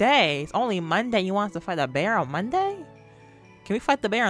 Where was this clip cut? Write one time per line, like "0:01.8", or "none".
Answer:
none